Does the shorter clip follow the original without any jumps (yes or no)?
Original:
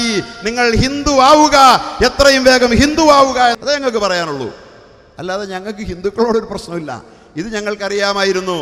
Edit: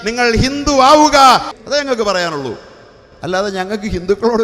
no